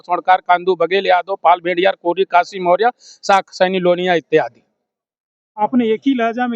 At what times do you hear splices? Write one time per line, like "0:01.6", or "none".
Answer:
none